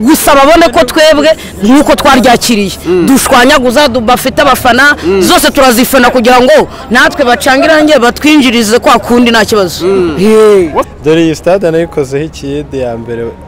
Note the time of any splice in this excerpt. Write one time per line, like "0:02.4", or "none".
0:10.9